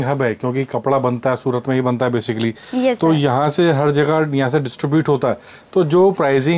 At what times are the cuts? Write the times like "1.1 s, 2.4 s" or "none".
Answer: none